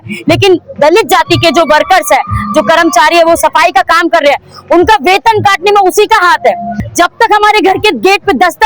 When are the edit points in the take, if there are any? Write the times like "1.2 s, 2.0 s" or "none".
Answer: 6.8 s